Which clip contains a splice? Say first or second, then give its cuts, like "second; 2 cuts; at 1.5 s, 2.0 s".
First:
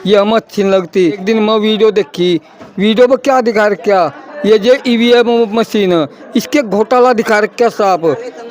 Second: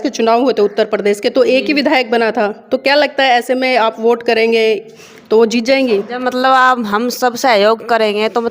first; 1 cut; at 1.2 s